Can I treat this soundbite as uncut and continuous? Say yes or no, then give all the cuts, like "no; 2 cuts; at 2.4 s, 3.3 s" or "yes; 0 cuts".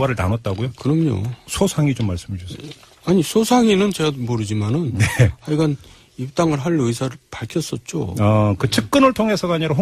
yes; 0 cuts